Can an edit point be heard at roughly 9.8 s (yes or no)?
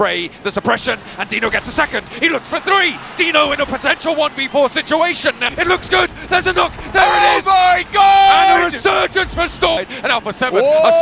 yes